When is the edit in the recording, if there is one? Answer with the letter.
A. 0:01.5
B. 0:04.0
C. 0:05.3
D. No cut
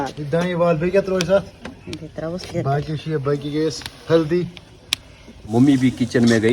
C